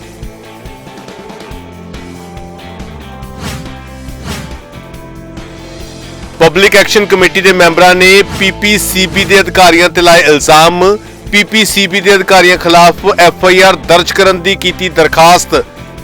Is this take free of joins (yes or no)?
yes